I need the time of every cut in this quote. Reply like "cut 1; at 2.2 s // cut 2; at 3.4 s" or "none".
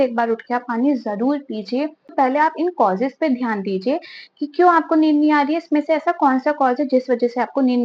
cut 1; at 2.1 s